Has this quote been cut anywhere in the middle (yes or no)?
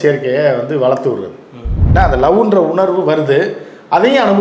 yes